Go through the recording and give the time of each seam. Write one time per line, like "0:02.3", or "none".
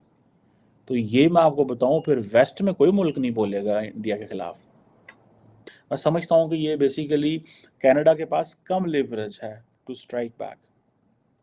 none